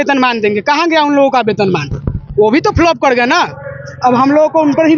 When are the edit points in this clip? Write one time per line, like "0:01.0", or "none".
none